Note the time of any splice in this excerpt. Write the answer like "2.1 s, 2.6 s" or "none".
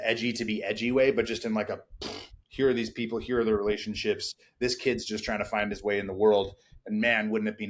none